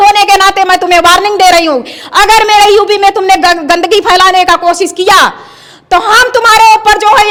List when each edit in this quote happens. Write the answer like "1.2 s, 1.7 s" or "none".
none